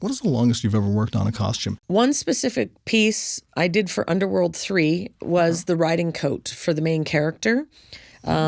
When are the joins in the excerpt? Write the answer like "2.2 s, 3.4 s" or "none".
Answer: 1.7 s